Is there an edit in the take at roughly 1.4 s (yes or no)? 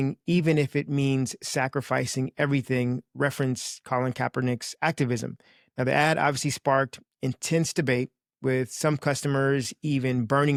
no